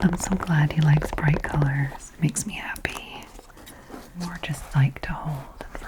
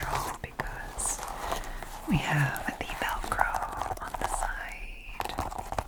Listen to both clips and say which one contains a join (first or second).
first